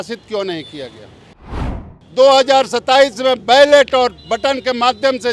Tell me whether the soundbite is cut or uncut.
cut